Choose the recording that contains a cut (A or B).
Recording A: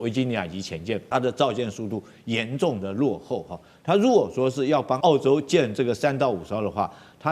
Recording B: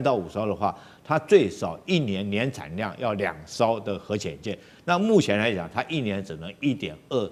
A